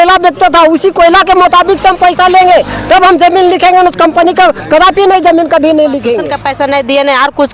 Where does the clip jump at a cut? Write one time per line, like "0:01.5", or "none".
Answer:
0:06.3

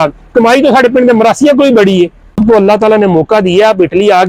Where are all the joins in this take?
0:02.4

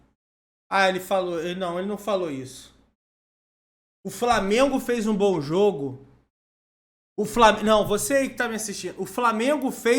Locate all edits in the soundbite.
none

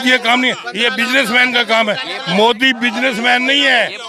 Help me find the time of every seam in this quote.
none

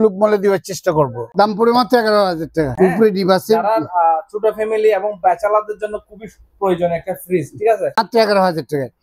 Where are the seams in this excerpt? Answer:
0:01.2
0:02.7
0:08.0

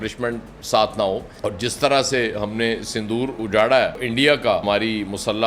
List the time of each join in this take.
0:01.3
0:04.6

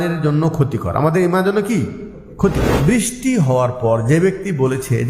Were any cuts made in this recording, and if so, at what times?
0:02.6

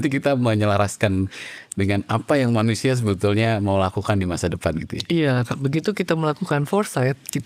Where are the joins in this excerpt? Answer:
none

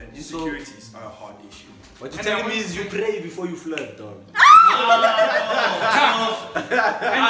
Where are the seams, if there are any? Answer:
none

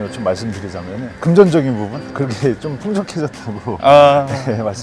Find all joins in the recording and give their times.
none

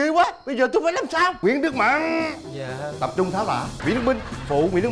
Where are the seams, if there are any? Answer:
0:01.4
0:03.8

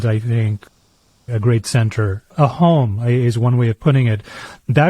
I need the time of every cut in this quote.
0:02.3

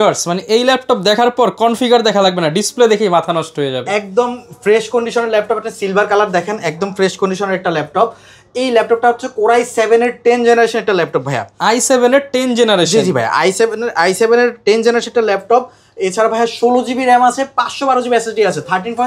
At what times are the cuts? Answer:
none

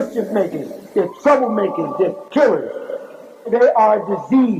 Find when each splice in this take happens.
none

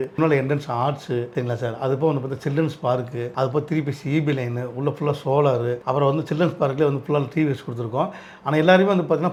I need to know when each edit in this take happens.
none

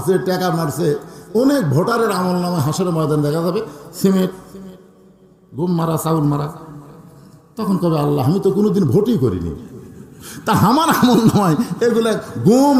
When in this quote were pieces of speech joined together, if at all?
none

